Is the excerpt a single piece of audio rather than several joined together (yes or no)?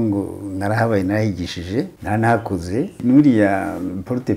no